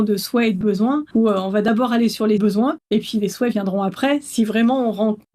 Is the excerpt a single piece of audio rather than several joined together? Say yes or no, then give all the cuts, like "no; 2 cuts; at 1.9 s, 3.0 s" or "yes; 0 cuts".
no; 2 cuts; at 1.1 s, 2.4 s